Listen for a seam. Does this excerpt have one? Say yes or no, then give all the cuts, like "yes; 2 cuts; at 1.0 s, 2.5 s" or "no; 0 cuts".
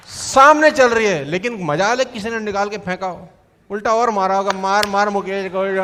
no; 0 cuts